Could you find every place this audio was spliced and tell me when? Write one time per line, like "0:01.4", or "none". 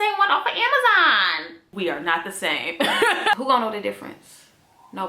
0:03.4